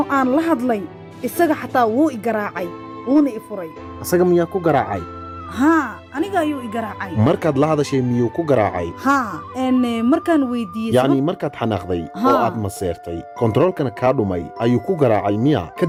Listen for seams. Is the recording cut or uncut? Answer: uncut